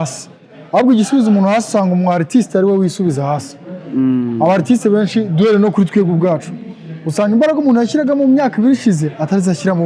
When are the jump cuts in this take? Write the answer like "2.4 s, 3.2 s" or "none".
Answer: none